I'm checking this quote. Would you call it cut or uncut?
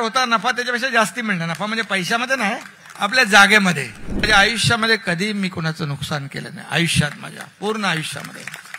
cut